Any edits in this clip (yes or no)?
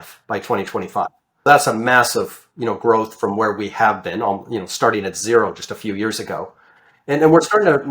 yes